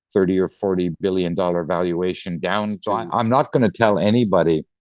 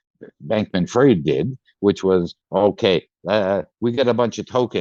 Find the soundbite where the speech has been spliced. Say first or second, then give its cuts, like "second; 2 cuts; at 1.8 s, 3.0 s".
first; 1 cut; at 2.8 s